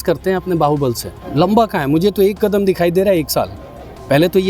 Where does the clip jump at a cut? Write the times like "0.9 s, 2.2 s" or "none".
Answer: 1.1 s